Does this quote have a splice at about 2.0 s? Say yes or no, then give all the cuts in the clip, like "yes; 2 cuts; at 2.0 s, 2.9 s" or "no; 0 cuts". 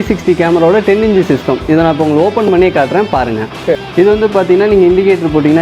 no; 1 cut; at 3.9 s